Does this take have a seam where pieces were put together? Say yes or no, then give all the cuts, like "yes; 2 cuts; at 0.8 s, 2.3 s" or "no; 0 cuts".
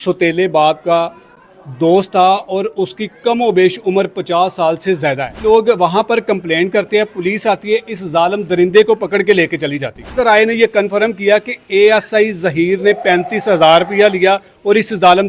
yes; 2 cuts; at 5.4 s, 10.2 s